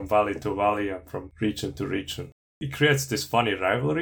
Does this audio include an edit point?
yes; 2 cuts; at 1.3 s, 2.6 s

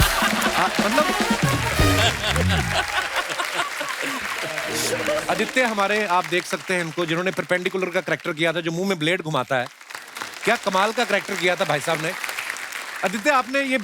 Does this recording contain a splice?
yes; 1 cut; at 5.2 s

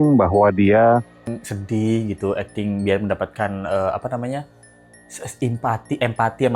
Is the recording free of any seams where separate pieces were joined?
no; 1 cut; at 1.3 s

